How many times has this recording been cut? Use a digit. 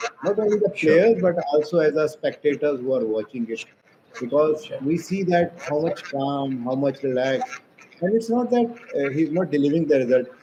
0